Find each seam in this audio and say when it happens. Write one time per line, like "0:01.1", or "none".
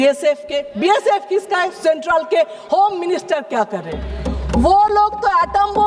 none